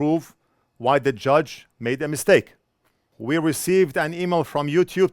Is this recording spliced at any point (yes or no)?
yes